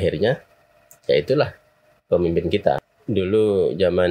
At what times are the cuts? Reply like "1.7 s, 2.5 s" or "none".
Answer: 2.9 s

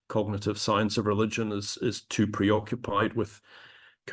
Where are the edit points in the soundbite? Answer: none

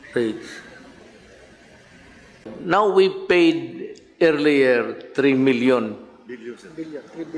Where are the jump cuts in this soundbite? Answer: 2.5 s

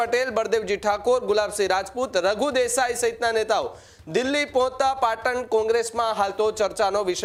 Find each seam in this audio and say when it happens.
none

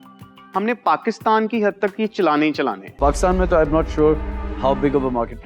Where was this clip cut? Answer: 2.9 s

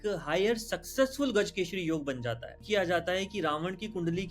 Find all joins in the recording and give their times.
2.6 s

